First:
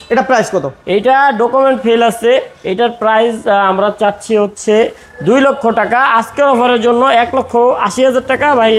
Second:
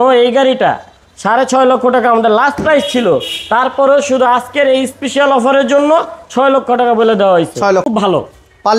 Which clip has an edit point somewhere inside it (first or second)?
second